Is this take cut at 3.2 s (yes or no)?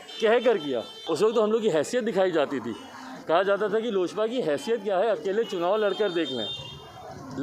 no